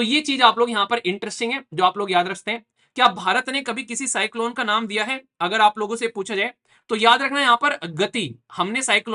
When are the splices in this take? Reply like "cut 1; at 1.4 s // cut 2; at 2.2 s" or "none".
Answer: none